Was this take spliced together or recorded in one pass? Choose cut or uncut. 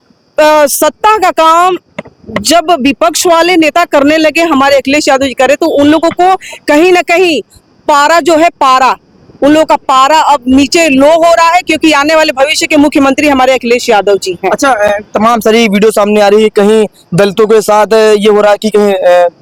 uncut